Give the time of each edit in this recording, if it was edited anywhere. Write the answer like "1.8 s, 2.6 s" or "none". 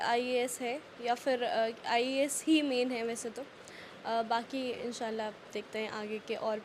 none